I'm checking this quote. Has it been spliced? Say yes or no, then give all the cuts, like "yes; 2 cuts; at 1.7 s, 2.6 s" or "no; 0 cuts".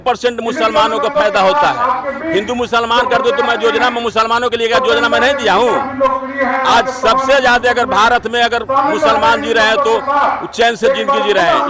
no; 0 cuts